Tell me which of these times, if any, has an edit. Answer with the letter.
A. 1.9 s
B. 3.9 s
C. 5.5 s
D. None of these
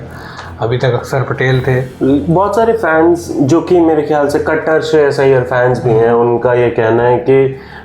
A